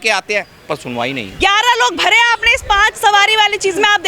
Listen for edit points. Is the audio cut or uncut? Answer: cut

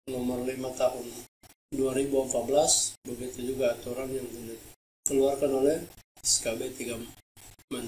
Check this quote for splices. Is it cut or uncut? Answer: uncut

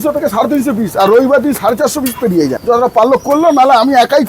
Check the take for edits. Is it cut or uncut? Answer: cut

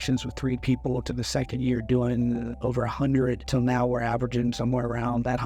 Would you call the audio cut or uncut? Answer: cut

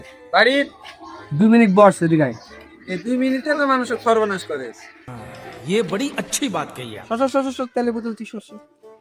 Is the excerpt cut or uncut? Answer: uncut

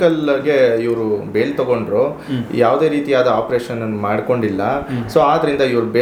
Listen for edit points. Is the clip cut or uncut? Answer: uncut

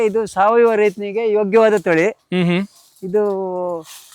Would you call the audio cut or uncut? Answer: uncut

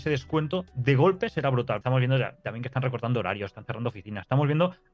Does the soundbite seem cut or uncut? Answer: cut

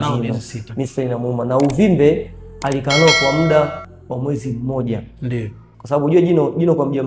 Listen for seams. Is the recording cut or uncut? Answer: cut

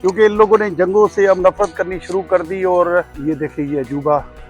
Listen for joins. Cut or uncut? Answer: cut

